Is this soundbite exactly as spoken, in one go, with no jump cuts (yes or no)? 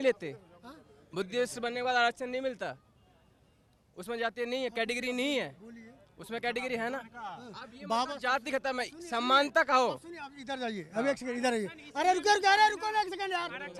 yes